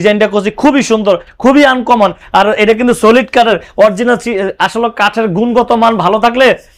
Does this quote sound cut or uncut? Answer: uncut